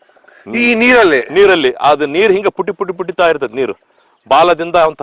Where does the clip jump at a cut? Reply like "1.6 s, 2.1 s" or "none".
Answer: none